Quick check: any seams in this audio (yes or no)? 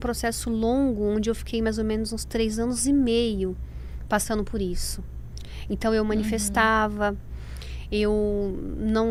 no